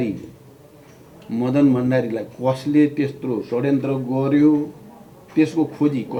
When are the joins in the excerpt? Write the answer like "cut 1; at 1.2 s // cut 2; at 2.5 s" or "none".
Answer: none